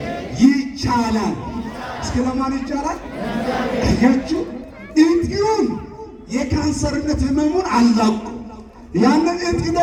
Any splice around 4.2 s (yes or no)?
no